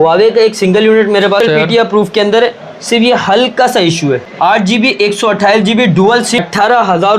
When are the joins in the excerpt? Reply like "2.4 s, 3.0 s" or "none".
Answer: 1.4 s, 4.3 s, 6.4 s